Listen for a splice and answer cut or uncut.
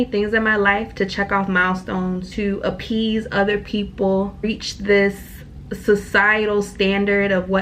cut